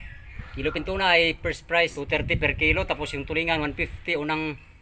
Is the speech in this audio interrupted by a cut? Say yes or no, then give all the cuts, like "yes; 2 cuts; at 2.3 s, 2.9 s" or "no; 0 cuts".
yes; 1 cut; at 2.0 s